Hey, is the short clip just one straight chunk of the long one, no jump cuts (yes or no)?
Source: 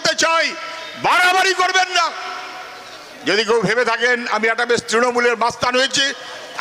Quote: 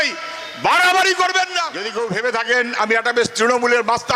no